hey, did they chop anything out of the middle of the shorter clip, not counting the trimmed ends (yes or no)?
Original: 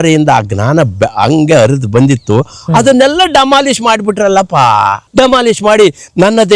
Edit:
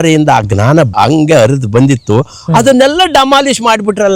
yes